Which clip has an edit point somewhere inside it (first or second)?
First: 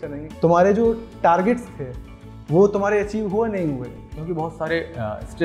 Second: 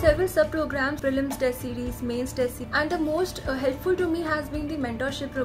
second